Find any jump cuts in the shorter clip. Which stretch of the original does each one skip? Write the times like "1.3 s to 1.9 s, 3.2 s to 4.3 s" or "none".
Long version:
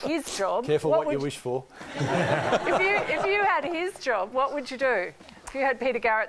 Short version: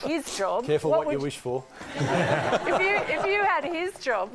none